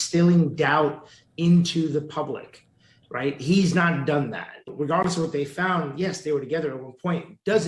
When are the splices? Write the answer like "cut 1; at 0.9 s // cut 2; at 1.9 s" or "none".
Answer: cut 1; at 4.7 s